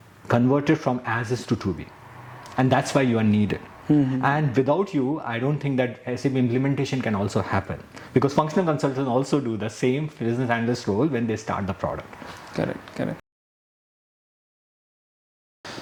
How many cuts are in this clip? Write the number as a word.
zero